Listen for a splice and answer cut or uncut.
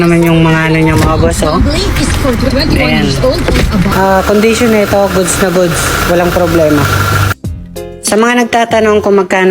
cut